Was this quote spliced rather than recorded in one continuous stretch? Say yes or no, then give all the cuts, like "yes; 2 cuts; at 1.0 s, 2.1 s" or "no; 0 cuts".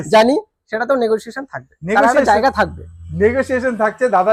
no; 0 cuts